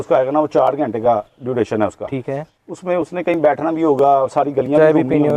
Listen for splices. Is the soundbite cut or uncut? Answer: uncut